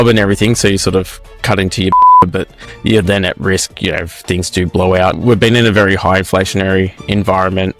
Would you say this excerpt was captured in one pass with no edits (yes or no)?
no